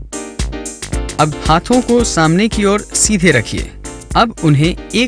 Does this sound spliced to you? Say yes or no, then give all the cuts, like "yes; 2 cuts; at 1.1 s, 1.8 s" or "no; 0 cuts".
yes; 1 cut; at 0.9 s